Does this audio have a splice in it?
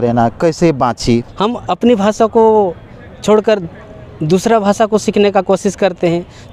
yes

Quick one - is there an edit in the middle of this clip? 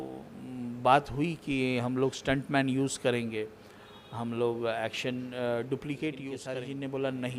yes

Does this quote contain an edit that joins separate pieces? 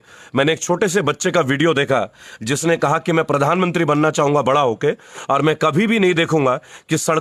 no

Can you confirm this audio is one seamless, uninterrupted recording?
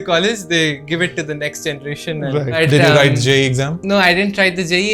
no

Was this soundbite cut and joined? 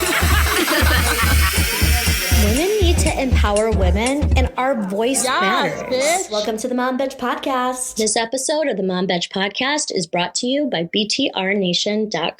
yes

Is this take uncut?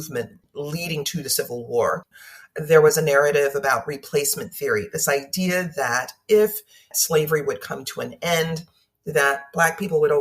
no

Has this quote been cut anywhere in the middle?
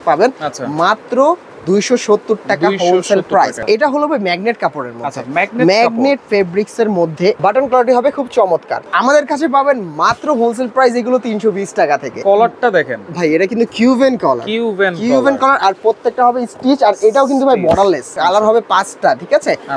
yes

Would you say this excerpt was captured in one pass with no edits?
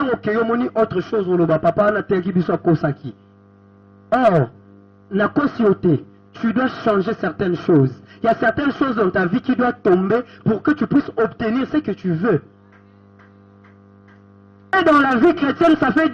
no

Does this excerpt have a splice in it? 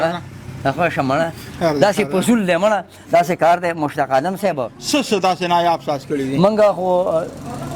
yes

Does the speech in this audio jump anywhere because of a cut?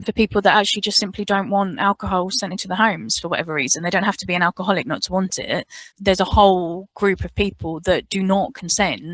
yes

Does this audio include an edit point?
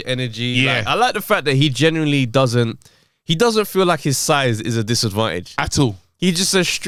no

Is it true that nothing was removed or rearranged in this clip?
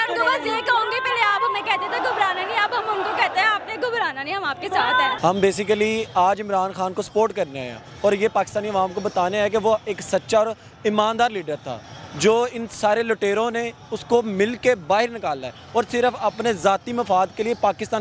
yes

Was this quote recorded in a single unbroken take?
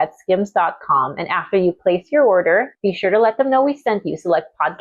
no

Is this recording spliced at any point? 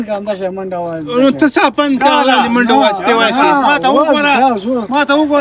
no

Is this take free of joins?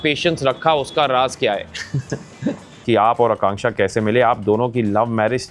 no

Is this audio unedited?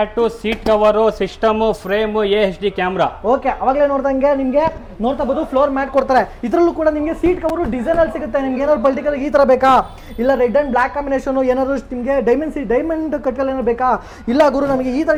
yes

